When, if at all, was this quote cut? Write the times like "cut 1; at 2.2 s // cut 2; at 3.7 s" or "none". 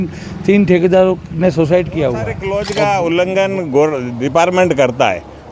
cut 1; at 2.5 s